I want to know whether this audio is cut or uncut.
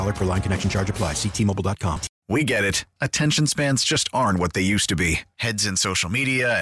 cut